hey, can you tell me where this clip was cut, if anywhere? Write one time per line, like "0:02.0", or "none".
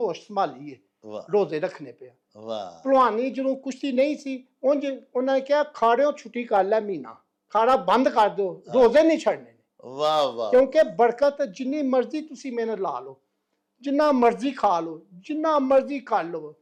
none